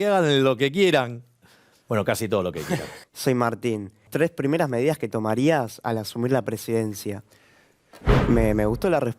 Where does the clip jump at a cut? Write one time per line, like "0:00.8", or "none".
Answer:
0:02.9
0:04.1
0:07.9